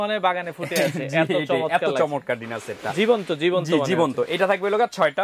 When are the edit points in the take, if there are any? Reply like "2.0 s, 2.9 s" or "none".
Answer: none